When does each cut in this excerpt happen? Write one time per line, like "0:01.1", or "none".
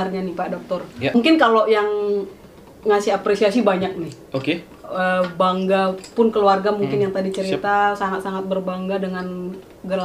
0:01.2

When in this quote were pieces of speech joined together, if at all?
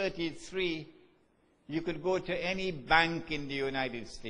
0:01.0

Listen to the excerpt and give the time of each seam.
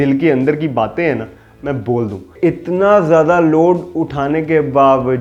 0:02.3

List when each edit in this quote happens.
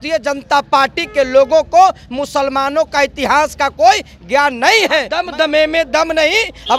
0:05.1

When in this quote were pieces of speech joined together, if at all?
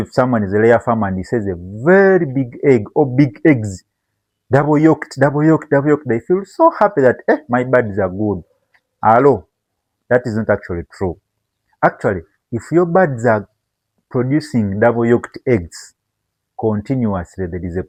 none

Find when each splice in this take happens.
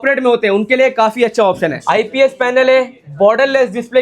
0:01.8

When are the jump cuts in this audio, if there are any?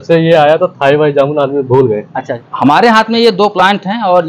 0:02.5

